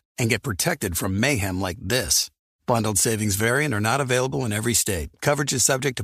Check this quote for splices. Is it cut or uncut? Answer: uncut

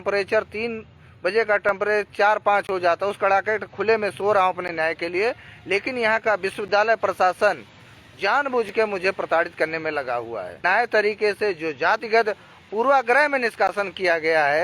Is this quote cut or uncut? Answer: cut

